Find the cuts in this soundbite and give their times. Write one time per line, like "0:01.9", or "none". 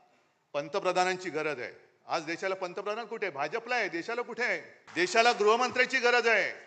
0:04.8